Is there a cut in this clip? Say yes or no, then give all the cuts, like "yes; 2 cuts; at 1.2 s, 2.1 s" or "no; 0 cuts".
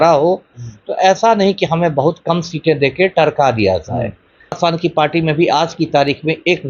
yes; 1 cut; at 4.6 s